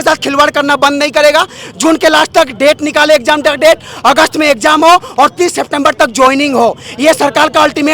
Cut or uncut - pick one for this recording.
uncut